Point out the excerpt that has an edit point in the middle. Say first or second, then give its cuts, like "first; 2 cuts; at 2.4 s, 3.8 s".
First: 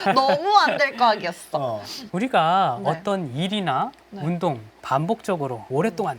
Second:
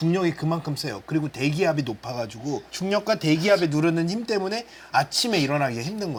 first; 1 cut; at 4.8 s